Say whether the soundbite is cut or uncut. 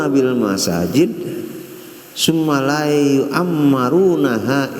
uncut